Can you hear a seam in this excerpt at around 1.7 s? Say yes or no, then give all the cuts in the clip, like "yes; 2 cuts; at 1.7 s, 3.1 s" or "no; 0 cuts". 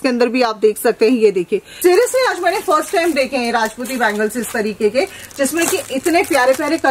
yes; 1 cut; at 1.7 s